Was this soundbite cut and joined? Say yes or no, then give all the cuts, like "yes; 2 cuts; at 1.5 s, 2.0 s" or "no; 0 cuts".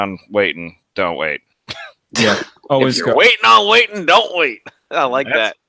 no; 0 cuts